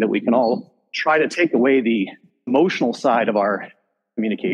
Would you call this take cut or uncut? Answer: uncut